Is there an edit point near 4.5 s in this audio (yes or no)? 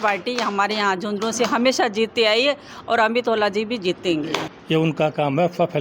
yes